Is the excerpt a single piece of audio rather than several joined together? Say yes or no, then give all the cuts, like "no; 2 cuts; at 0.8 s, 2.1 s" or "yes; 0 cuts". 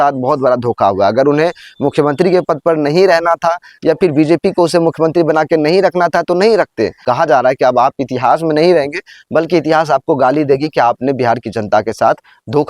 no; 1 cut; at 7.0 s